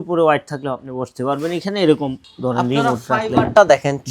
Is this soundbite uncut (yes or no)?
no